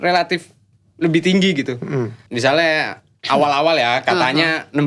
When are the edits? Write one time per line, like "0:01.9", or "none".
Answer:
0:02.2